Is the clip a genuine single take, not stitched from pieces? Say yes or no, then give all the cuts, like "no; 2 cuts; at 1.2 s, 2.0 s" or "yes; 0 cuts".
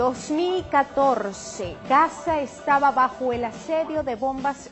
yes; 0 cuts